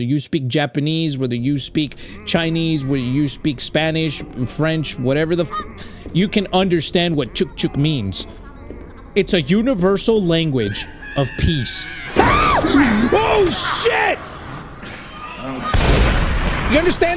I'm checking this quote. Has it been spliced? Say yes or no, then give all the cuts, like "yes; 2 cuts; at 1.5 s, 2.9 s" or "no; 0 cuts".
no; 0 cuts